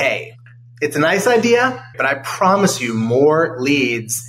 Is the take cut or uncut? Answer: cut